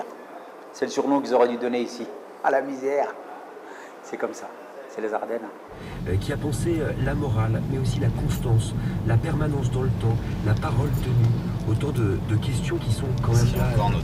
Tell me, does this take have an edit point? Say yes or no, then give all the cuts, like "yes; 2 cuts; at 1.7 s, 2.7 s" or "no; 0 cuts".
no; 0 cuts